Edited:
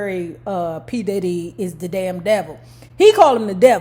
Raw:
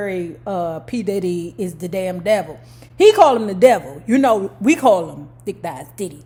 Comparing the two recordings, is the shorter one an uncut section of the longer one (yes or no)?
yes